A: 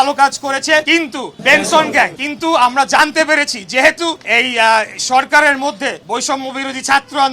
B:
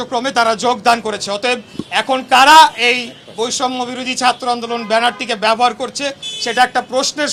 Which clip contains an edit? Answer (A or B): A